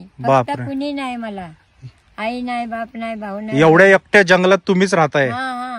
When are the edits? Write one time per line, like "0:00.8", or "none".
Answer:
none